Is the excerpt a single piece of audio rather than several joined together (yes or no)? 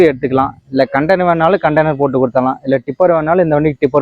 yes